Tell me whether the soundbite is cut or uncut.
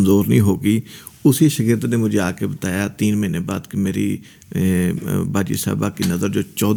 uncut